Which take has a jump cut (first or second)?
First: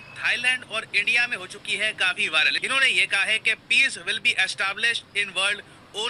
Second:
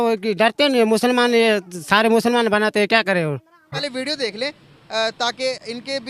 second